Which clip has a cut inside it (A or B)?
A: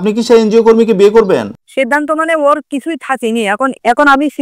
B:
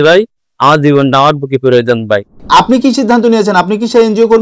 B